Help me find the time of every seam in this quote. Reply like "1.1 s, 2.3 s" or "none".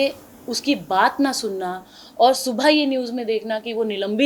none